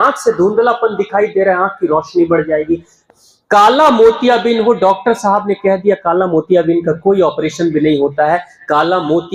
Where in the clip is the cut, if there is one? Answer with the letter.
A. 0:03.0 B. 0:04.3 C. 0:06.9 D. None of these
A